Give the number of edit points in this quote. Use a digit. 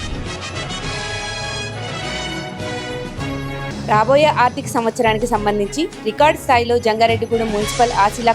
1